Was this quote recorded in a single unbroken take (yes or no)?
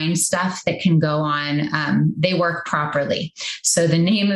yes